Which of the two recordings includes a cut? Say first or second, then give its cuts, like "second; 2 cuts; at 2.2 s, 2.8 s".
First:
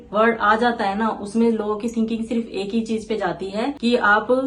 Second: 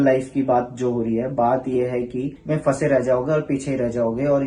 second; 1 cut; at 2.4 s